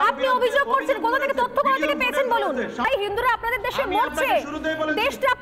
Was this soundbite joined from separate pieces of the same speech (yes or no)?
yes